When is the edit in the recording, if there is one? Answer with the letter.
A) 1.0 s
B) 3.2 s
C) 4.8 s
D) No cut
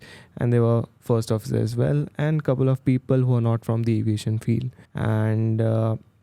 C